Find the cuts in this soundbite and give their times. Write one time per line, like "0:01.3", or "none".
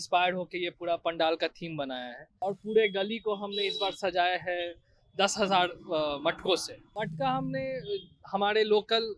0:02.4
0:06.8